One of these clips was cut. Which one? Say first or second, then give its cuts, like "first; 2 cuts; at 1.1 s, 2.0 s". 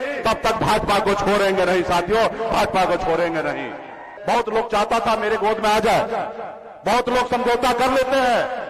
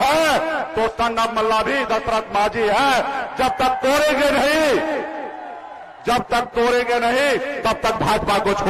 first; 1 cut; at 4.1 s